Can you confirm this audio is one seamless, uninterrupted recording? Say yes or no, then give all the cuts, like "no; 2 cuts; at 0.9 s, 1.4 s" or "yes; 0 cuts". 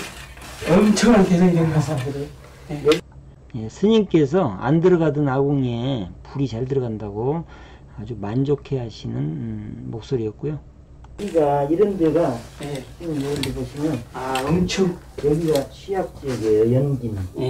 yes; 0 cuts